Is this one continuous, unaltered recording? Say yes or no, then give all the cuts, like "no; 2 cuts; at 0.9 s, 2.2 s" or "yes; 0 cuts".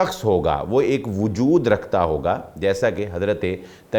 yes; 0 cuts